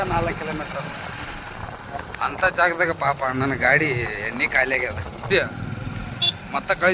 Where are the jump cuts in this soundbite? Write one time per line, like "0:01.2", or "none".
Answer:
0:05.3